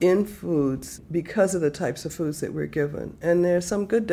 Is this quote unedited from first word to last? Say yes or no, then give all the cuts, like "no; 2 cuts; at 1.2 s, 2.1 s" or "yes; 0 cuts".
no; 1 cut; at 1.0 s